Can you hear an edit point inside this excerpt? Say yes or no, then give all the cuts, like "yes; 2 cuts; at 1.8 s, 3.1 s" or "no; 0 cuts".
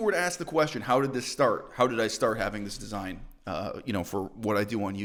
no; 0 cuts